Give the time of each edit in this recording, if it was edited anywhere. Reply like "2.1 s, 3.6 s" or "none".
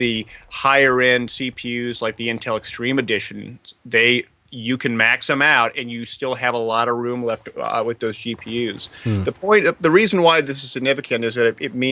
5.6 s